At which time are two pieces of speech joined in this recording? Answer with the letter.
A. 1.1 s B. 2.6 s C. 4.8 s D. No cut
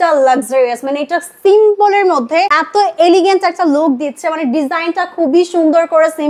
B